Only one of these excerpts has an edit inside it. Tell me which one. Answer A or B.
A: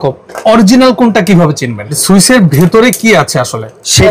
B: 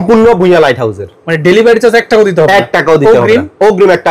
A